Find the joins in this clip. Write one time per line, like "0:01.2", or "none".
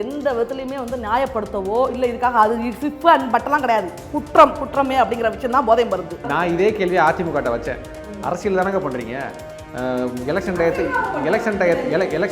0:06.3